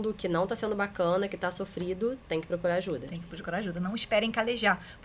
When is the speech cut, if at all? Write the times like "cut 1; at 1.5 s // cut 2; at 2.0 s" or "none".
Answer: none

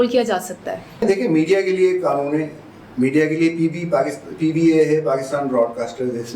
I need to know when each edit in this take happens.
cut 1; at 1.0 s

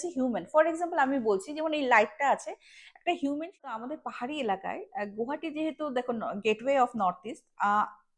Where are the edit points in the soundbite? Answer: cut 1; at 3.8 s

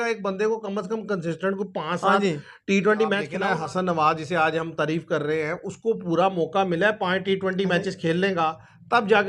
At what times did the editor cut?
cut 1; at 3.5 s

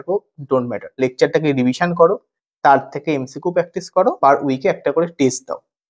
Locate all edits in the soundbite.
cut 1; at 0.9 s // cut 2; at 4.2 s

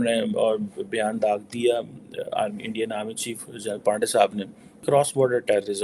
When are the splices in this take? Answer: cut 1; at 4.8 s

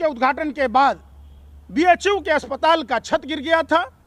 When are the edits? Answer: none

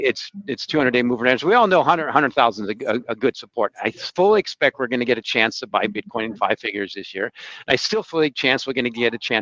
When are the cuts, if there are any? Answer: none

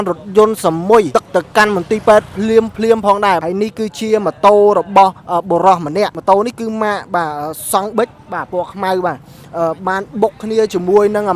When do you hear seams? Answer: cut 1; at 1.1 s // cut 2; at 3.4 s // cut 3; at 6.2 s

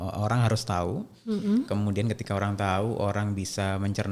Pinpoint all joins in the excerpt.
none

